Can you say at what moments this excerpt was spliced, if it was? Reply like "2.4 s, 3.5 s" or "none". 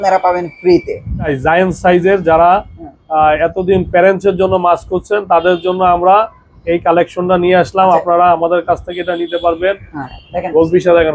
1.3 s, 10.0 s